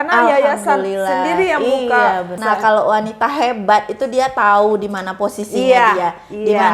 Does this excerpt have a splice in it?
yes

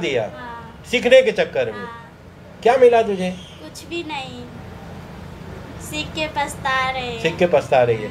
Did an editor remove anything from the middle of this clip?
no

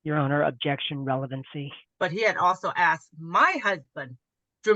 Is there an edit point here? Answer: yes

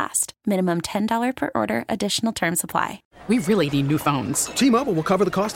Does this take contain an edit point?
yes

